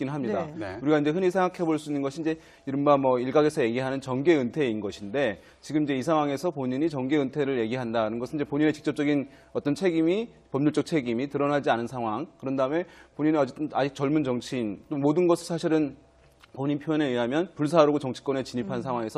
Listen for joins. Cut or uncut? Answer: cut